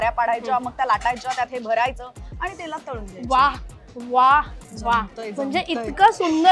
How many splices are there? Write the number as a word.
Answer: zero